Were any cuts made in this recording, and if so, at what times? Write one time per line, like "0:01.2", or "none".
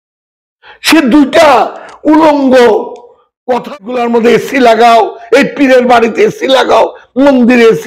0:03.7

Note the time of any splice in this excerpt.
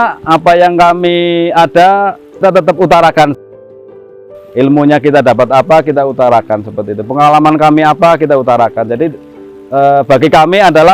0:02.4

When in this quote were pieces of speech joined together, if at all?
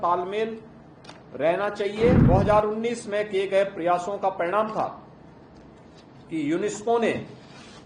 0:02.2

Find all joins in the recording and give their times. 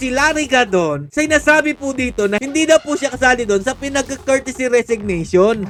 none

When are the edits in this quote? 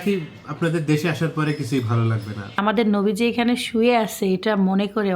0:02.6

